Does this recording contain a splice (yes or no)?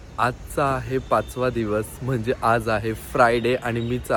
no